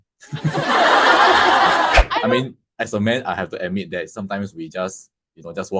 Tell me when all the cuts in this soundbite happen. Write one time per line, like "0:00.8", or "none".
0:02.3